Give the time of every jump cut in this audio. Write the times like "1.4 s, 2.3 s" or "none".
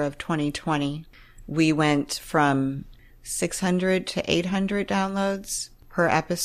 1.0 s, 2.9 s